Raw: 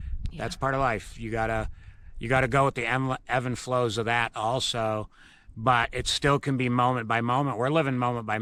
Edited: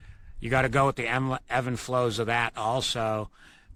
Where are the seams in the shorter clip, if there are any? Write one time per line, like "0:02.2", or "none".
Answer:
none